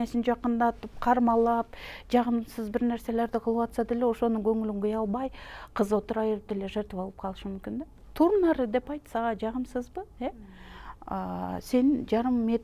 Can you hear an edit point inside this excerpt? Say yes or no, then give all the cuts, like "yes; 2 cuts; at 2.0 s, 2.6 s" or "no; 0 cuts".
no; 0 cuts